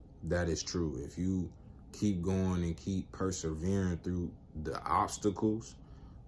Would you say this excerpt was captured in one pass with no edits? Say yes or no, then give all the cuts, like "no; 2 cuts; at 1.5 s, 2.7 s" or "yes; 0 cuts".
yes; 0 cuts